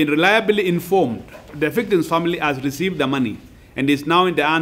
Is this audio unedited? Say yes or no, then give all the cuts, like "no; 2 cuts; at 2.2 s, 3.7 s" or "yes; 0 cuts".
no; 1 cut; at 1.5 s